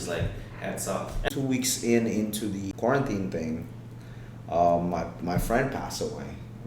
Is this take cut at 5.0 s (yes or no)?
no